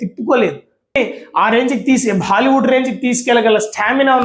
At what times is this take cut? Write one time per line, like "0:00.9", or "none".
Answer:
0:00.9